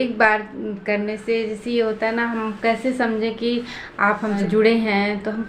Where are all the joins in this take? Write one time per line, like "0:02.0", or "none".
0:04.4